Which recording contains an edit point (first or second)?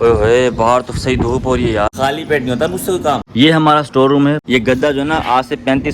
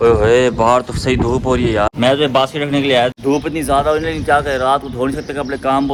first